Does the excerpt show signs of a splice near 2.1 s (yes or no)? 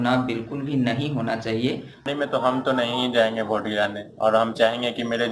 yes